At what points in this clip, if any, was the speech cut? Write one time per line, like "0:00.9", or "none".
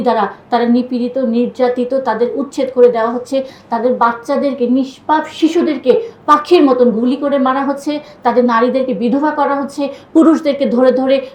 none